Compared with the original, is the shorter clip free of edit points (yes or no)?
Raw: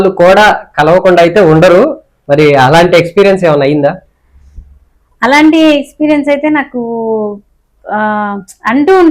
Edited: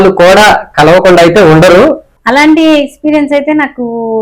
no